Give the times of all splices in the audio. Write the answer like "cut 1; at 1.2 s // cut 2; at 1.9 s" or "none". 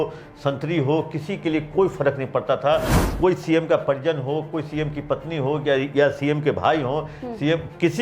none